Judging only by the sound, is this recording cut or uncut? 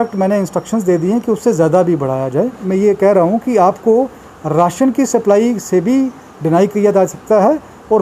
cut